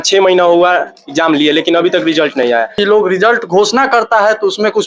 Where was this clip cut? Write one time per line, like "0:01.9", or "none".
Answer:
0:02.7

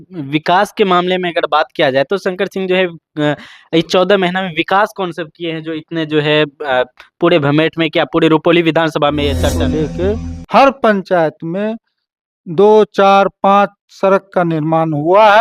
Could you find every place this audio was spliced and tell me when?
0:09.7

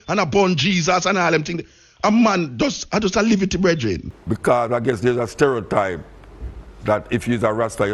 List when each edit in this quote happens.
0:04.1

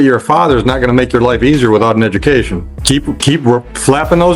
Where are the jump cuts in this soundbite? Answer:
0:02.7

